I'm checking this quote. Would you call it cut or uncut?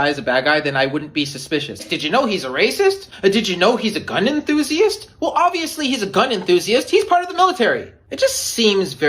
cut